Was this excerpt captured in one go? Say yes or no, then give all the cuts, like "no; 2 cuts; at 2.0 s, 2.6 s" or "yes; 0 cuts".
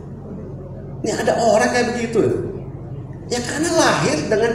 yes; 0 cuts